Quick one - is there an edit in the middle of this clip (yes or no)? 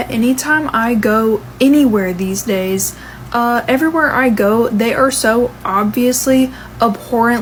no